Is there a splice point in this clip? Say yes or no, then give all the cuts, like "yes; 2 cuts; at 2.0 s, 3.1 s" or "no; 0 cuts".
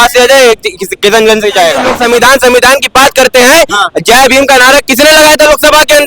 yes; 1 cut; at 1.9 s